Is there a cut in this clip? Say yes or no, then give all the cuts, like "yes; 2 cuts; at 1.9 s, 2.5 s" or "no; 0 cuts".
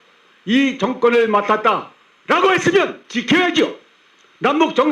yes; 1 cut; at 3.0 s